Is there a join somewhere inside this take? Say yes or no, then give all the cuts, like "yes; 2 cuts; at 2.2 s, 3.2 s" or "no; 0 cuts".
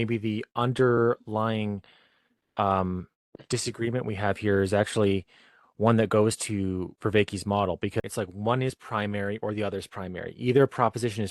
yes; 1 cut; at 8.0 s